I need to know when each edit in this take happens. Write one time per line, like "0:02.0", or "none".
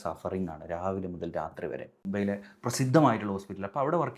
0:02.1